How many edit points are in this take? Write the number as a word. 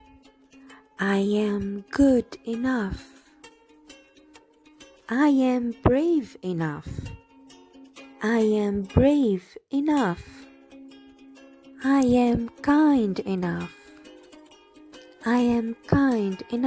two